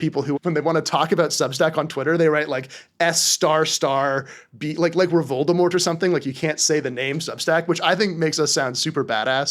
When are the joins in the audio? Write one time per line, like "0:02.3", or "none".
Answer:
none